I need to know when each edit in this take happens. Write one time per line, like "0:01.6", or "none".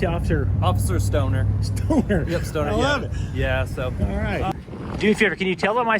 0:04.5